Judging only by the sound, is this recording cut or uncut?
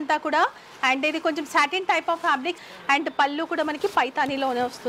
cut